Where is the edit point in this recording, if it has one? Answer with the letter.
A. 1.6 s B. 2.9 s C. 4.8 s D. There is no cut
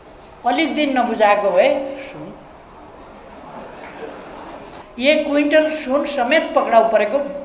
C